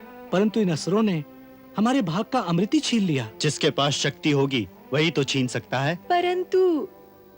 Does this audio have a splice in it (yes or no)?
yes